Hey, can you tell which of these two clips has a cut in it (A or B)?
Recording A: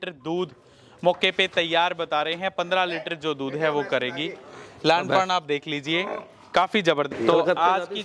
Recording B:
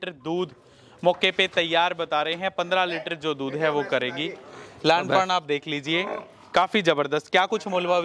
A